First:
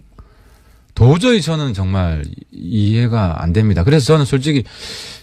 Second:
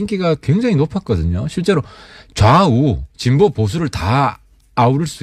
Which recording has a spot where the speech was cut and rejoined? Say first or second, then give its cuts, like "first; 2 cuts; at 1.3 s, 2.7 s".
first; 1 cut; at 1.1 s